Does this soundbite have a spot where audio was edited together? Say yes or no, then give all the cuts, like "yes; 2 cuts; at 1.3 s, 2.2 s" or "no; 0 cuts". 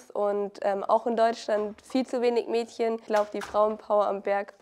yes; 1 cut; at 3.0 s